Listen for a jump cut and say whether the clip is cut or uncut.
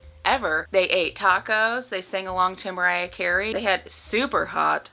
cut